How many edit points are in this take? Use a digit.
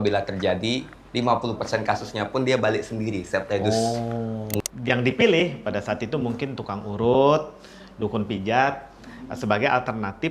1